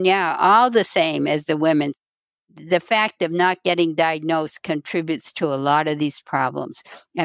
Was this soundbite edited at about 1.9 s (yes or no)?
yes